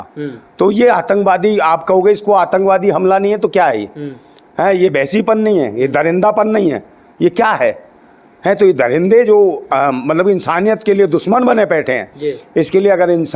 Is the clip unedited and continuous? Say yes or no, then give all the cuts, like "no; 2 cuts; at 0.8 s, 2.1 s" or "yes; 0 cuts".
yes; 0 cuts